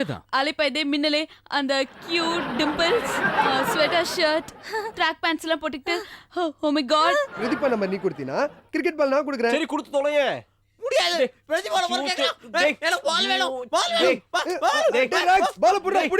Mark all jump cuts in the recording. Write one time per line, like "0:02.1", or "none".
0:07.4